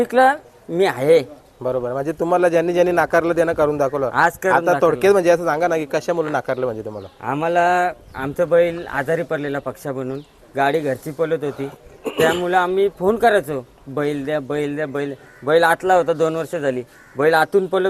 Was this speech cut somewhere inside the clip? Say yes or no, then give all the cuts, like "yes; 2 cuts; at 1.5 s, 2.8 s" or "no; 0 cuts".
no; 0 cuts